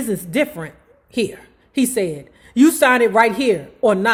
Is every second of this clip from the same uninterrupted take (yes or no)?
yes